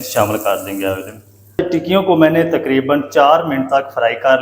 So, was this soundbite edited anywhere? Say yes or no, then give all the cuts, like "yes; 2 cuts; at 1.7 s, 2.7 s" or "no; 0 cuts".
yes; 1 cut; at 1.6 s